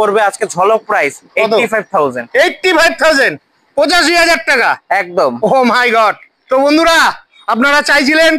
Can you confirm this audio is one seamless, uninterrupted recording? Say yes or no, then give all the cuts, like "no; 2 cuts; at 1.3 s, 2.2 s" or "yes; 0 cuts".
yes; 0 cuts